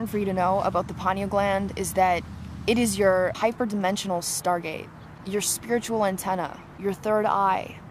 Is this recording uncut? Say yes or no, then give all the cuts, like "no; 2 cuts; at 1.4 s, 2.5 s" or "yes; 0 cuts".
yes; 0 cuts